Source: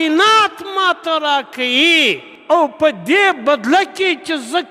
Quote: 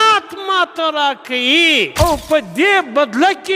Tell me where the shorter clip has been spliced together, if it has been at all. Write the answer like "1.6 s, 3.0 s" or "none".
1.9 s